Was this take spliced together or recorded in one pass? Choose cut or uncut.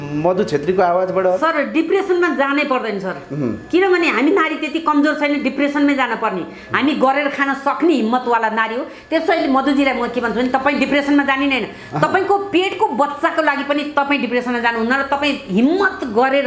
uncut